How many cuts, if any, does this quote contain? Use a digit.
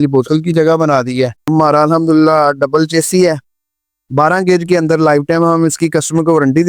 1